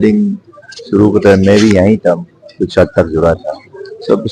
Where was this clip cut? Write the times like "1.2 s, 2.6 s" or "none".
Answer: none